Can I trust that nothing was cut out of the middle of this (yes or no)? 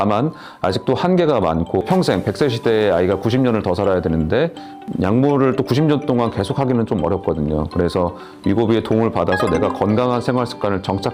no